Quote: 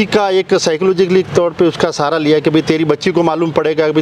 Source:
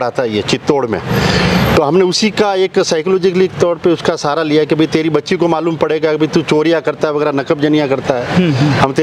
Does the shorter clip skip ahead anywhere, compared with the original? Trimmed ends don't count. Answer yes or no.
no